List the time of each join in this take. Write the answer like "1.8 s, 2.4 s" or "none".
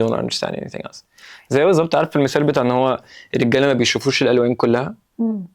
none